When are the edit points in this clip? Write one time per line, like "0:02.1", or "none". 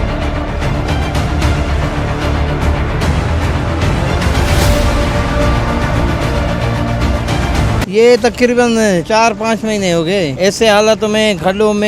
none